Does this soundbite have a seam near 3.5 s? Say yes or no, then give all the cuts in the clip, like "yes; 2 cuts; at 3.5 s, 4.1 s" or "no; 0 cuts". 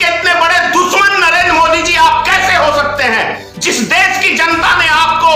no; 0 cuts